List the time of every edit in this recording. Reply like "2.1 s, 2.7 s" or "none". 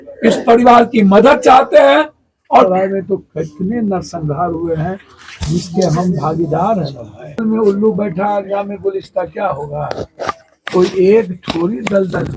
2.7 s, 7.4 s